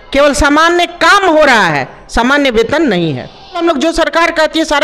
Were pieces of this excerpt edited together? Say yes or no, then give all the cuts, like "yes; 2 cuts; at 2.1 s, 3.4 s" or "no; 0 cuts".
yes; 1 cut; at 3.6 s